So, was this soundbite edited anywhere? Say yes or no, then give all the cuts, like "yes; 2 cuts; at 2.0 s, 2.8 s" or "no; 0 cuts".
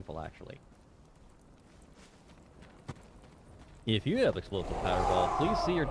no; 0 cuts